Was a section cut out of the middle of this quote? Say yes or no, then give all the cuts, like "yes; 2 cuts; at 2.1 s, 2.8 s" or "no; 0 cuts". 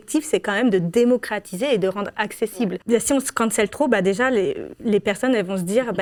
no; 0 cuts